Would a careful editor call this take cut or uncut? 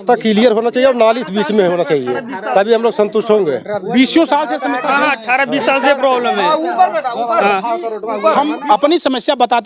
cut